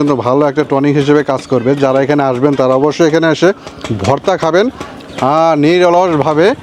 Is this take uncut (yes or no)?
yes